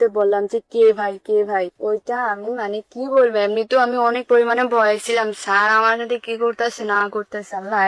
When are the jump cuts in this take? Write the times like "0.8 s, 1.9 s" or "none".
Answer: none